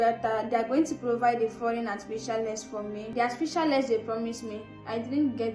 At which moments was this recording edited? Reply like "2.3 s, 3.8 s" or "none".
3.1 s